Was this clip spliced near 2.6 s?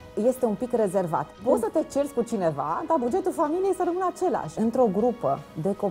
no; 2 cuts; at 1.3 s, 4.5 s

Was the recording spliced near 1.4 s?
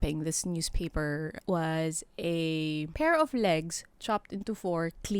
yes; 2 cuts; at 1.4 s, 2.9 s

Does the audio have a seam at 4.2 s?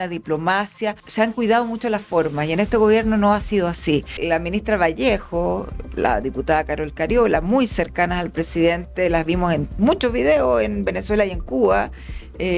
yes; 2 cuts; at 1.0 s, 4.2 s

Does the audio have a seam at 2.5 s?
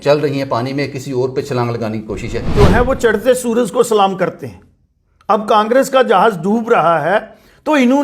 yes; 1 cut; at 2.5 s

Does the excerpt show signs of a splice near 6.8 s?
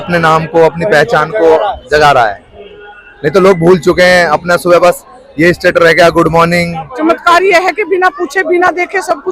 yes; 1 cut; at 6.8 s

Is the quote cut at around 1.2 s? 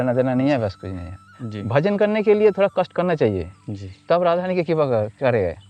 yes; 1 cut; at 1.2 s

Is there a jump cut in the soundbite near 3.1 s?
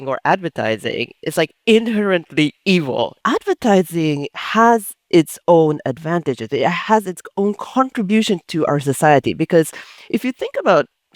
yes; 1 cut; at 3.1 s

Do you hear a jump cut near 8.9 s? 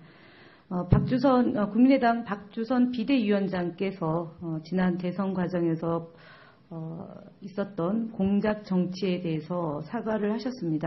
yes; 1 cut; at 8.9 s

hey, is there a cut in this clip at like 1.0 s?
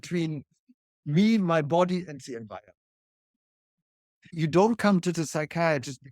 no; 1 cut; at 4.3 s

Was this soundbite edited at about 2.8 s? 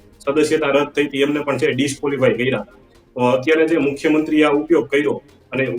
no; 0 cuts

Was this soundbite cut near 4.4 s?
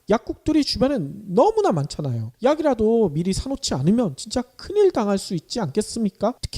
no; 1 cut; at 2.0 s

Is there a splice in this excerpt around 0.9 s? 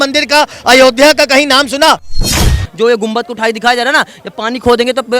no; 1 cut; at 2.2 s

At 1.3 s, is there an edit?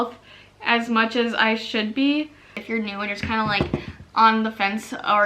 no; 1 cut; at 2.5 s

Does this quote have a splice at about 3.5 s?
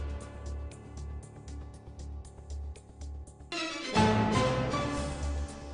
yes; 1 cut; at 3.5 s

